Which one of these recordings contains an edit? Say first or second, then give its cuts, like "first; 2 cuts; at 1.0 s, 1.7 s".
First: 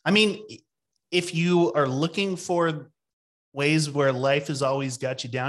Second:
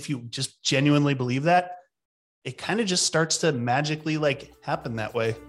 second; 1 cut; at 4.5 s